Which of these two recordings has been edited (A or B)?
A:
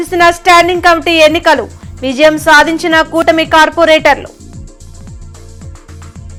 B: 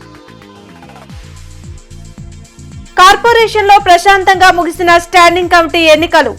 B